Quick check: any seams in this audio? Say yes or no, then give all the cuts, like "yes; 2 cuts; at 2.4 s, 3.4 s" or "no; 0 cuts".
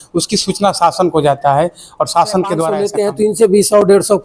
yes; 1 cut; at 2.9 s